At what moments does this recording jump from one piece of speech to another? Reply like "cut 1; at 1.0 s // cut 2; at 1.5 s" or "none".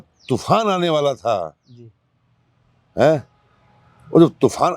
none